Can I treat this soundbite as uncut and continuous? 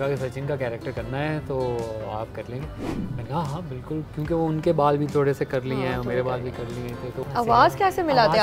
no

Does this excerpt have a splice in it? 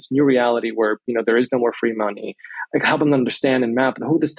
no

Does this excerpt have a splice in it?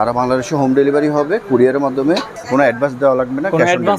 yes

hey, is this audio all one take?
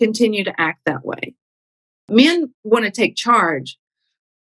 no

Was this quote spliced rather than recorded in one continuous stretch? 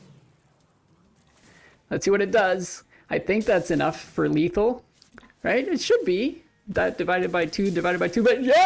no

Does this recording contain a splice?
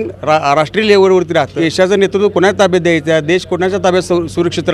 yes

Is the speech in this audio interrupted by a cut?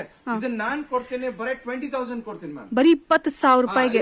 no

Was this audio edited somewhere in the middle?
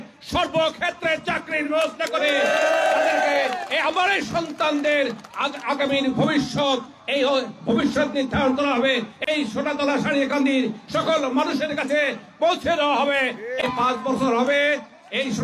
no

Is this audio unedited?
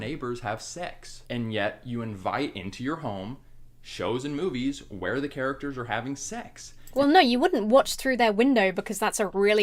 yes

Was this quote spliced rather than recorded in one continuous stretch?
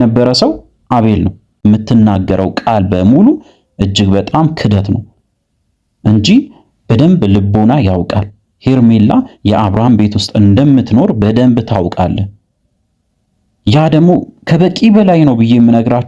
yes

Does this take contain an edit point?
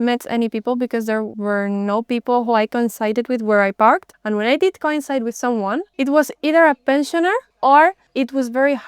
yes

